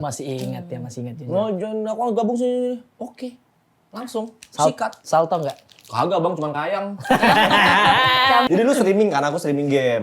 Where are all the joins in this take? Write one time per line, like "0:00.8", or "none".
0:08.5